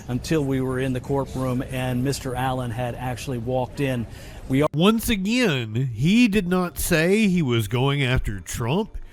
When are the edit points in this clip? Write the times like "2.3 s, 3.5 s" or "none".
none